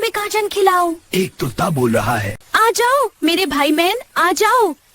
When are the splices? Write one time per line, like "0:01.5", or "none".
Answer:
0:02.4